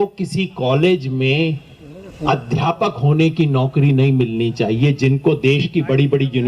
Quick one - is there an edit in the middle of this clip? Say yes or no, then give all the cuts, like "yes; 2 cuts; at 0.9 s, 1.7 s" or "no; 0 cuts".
no; 0 cuts